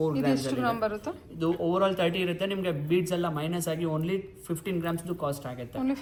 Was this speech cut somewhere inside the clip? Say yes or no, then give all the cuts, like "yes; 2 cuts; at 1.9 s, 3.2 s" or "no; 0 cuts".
no; 0 cuts